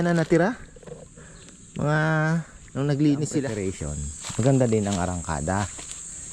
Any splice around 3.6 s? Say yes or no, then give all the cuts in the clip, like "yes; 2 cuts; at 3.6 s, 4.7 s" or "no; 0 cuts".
yes; 1 cut; at 3.6 s